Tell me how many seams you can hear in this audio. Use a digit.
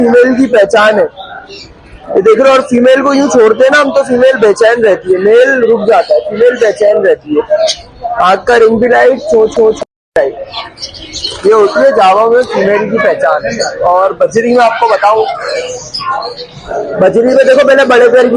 0